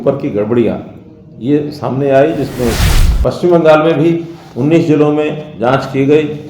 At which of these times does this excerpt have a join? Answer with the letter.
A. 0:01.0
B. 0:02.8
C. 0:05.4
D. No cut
B